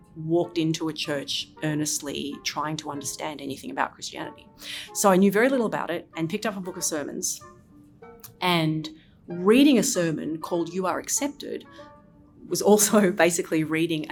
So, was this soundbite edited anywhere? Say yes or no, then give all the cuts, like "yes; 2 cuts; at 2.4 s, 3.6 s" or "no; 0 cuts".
no; 0 cuts